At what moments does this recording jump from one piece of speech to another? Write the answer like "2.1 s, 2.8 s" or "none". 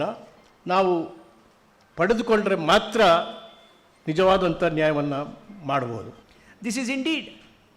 6.1 s